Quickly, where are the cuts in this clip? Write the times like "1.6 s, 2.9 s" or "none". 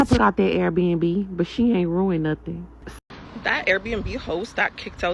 2.8 s